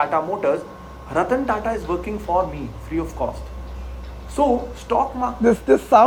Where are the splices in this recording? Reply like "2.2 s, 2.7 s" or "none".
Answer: none